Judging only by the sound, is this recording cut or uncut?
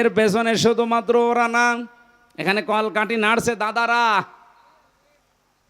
uncut